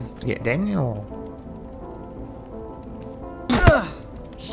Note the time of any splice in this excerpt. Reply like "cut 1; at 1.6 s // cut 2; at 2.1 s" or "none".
cut 1; at 3.5 s